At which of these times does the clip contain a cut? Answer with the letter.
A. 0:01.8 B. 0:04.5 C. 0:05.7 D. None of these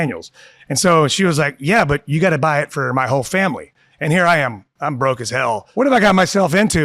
C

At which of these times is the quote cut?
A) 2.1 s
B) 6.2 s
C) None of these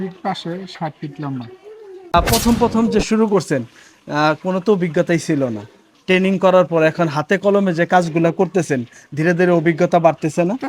A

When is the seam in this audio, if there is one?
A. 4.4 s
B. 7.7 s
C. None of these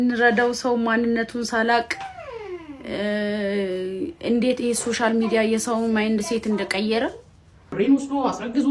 B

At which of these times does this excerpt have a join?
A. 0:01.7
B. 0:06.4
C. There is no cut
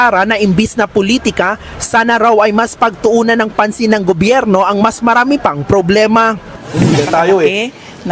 C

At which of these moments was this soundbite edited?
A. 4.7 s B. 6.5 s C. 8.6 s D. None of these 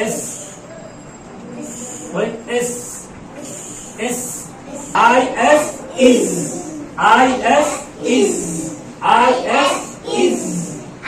A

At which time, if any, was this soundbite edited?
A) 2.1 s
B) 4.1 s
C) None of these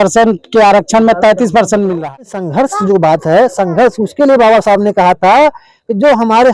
A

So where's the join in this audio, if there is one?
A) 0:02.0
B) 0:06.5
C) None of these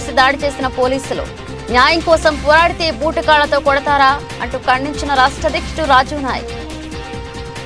C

